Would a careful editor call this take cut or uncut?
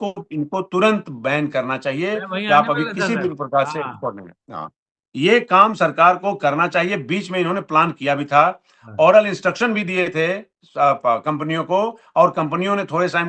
uncut